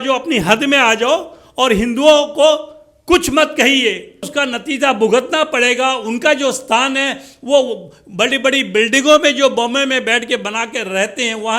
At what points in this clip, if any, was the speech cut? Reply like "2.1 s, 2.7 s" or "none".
4.3 s